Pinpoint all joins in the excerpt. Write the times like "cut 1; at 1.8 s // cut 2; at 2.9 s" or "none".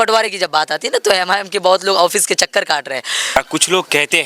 cut 1; at 3.4 s

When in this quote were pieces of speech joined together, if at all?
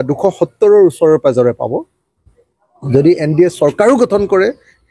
none

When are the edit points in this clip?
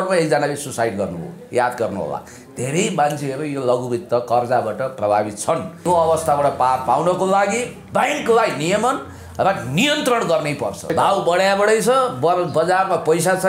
cut 1; at 5.8 s // cut 2; at 10.9 s

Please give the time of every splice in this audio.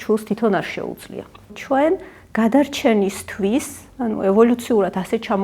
cut 1; at 1.6 s

